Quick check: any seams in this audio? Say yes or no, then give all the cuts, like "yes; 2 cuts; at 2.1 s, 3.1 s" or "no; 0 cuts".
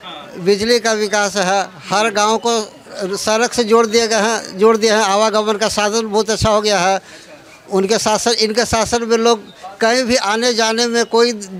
no; 0 cuts